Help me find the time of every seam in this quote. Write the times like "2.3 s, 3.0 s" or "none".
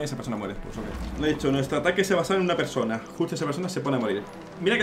1.0 s